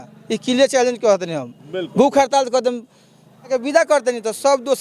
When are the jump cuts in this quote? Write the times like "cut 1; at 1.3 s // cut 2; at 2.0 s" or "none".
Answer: cut 1; at 3.5 s